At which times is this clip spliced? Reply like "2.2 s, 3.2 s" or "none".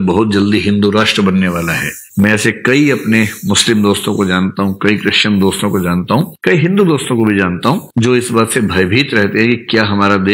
none